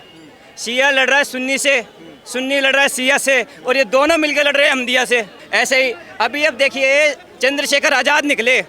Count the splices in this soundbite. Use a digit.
1